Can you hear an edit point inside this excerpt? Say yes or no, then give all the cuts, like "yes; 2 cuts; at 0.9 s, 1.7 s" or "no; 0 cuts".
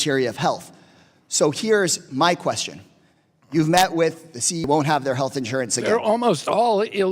yes; 1 cut; at 4.6 s